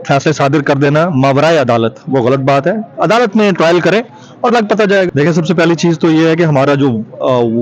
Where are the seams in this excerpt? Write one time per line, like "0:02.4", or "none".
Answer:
0:05.1